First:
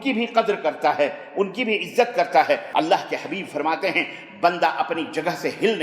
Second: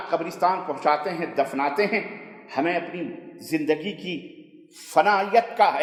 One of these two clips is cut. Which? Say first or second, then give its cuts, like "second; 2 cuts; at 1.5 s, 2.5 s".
first; 1 cut; at 2.6 s